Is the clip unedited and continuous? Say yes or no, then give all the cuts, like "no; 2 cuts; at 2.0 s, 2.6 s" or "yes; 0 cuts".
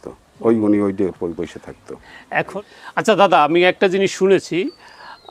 no; 1 cut; at 2.5 s